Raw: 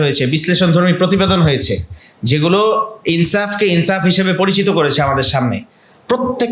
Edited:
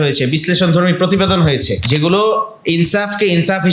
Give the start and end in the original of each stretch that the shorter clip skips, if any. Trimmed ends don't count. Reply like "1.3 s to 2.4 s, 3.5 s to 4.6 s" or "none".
1.8 s to 2.2 s